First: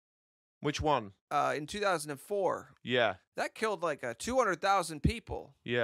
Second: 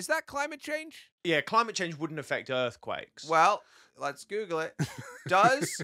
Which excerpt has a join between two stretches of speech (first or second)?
second